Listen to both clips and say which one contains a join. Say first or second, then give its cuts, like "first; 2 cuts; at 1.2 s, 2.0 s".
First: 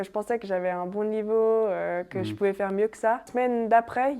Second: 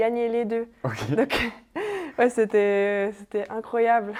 first; 1 cut; at 3.3 s